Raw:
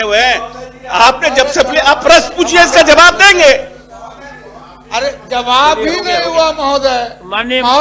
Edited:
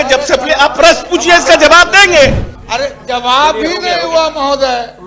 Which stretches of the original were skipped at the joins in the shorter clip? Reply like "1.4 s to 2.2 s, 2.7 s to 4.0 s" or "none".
3.8 s to 4.7 s